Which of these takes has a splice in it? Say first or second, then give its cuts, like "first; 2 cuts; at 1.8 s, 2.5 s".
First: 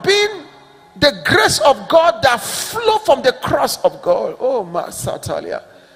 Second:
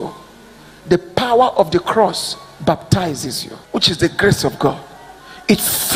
second; 1 cut; at 3.5 s